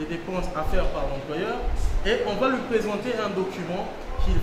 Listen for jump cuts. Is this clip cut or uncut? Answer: uncut